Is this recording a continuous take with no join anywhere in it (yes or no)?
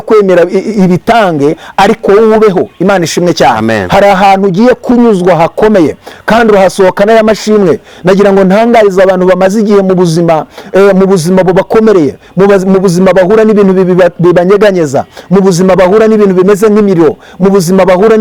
yes